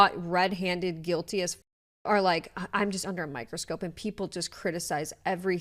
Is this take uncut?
yes; 0 cuts

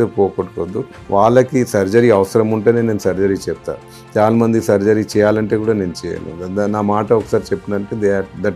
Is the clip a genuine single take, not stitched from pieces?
no; 1 cut; at 0.9 s

